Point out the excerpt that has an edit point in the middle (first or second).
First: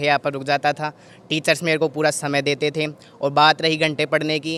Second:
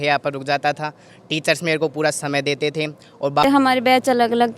second